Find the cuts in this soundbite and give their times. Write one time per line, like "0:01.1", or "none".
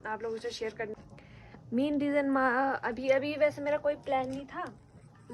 0:00.9